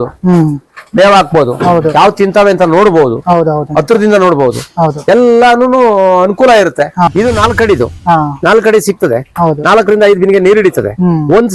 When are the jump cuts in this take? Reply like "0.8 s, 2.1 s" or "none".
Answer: 7.1 s